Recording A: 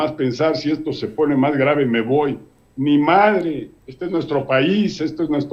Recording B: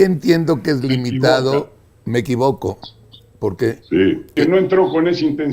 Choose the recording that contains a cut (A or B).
B